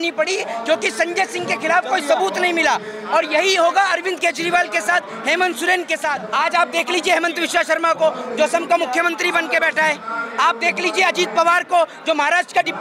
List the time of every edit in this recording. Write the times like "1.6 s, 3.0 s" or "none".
6.2 s